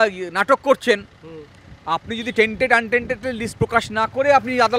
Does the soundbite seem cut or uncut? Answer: uncut